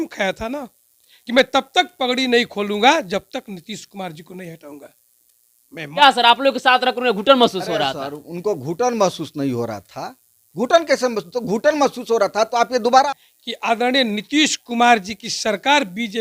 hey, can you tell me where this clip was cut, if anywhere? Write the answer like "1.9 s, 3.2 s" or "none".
6.0 s, 13.1 s